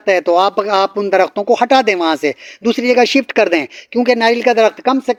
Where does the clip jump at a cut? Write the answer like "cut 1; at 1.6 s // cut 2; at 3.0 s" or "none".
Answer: none